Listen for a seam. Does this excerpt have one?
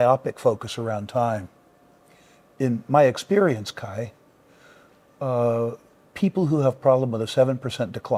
no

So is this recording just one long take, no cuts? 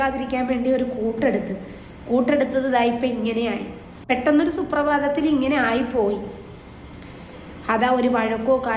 no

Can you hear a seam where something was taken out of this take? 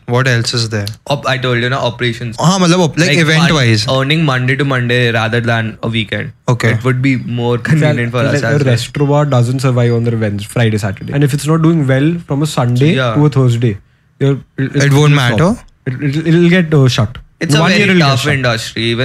yes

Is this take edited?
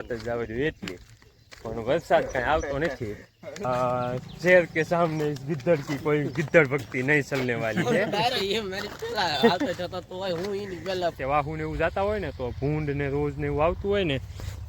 yes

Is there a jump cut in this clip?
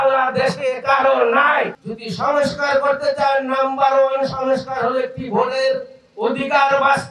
yes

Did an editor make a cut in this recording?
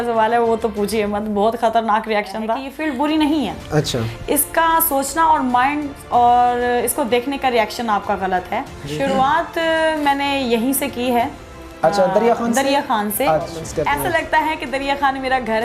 yes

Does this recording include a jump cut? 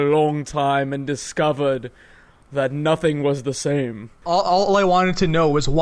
yes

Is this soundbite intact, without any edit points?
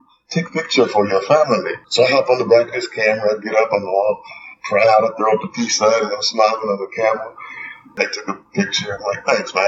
no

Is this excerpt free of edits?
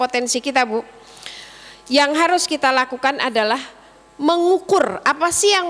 yes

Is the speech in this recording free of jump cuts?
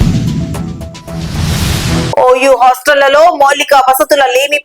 no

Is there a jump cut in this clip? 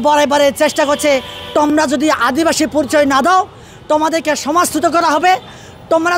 no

